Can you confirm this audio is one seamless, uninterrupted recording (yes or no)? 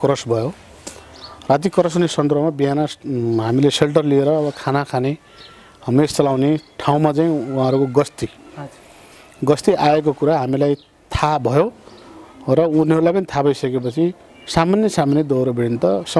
yes